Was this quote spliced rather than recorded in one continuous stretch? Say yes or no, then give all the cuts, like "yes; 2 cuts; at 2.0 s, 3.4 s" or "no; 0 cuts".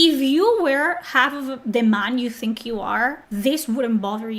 yes; 1 cut; at 3.2 s